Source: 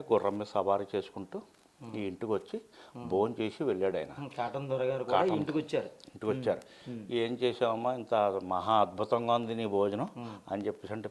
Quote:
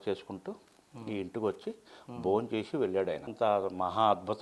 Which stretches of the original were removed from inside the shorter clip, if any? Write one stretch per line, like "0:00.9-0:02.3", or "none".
0:04.2-0:08.0